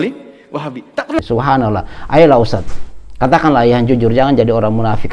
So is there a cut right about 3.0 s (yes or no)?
no